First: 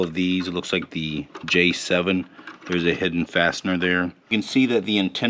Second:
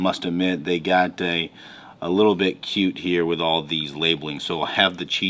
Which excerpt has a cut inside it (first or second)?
first